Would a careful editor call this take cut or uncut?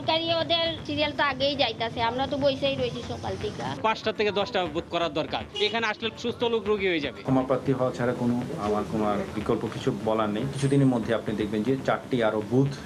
cut